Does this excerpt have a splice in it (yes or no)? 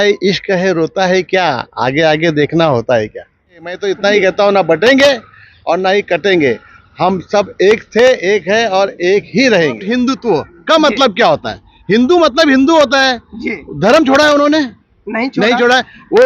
yes